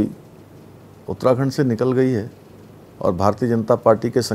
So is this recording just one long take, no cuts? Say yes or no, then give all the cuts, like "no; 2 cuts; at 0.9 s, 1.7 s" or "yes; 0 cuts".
yes; 0 cuts